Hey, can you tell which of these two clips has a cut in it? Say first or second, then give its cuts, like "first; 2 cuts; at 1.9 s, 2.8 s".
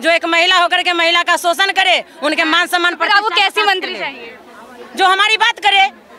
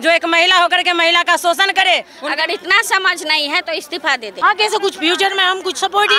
second; 2 cuts; at 2.1 s, 4.3 s